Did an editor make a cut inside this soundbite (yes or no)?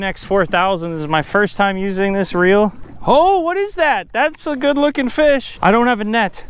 yes